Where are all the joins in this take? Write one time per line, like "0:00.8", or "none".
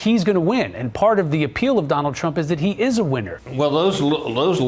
0:03.4